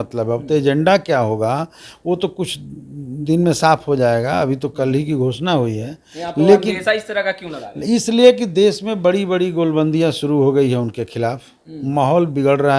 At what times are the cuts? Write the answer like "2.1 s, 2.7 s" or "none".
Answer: none